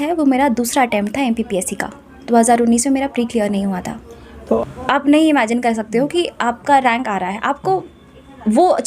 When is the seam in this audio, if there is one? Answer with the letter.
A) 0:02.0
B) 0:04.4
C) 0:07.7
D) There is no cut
B